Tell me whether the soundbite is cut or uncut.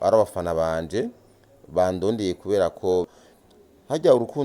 cut